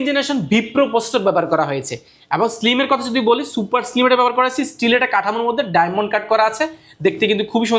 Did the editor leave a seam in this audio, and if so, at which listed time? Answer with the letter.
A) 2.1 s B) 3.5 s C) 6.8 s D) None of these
D